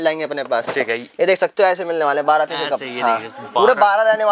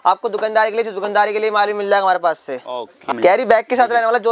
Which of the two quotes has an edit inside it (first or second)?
second